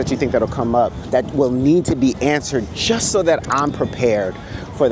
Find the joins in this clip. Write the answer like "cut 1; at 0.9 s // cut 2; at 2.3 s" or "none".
cut 1; at 1.0 s